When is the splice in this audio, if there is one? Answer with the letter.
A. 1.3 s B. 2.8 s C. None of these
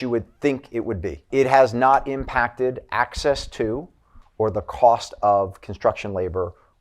A